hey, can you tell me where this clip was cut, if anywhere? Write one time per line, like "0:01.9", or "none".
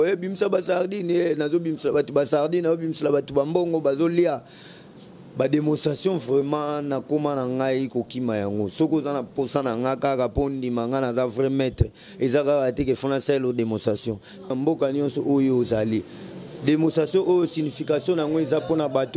0:14.5